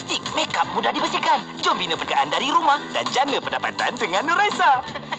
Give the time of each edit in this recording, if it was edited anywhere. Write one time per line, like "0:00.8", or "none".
0:02.0